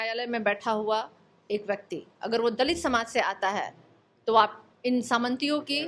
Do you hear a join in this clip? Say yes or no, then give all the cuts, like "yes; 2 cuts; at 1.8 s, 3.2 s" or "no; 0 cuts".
no; 0 cuts